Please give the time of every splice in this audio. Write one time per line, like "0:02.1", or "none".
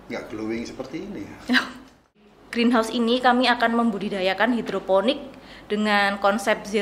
0:02.3